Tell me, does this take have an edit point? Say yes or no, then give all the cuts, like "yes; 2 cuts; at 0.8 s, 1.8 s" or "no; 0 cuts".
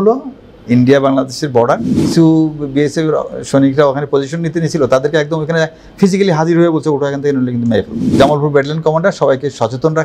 yes; 2 cuts; at 2.0 s, 8.1 s